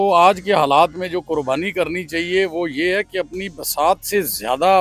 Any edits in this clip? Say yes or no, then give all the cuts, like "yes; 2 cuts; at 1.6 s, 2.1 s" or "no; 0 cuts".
no; 0 cuts